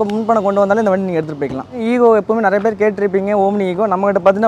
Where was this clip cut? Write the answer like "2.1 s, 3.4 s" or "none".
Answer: 1.8 s